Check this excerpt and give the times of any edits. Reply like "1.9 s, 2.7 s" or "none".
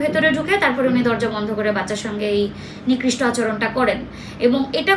none